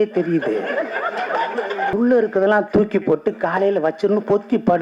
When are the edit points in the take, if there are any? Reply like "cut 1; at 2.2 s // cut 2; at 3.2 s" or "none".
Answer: cut 1; at 1.9 s